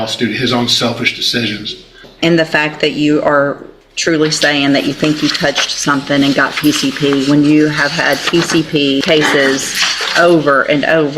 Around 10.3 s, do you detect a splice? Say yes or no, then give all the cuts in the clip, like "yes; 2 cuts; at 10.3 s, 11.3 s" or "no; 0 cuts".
no; 2 cuts; at 2.1 s, 9.0 s